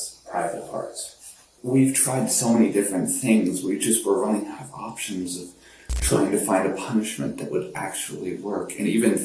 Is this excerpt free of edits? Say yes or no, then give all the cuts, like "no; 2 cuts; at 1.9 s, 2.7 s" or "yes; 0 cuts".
no; 1 cut; at 1.5 s